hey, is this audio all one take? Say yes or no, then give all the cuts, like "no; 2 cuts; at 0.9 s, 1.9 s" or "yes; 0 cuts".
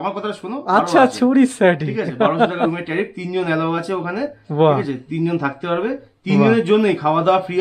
yes; 0 cuts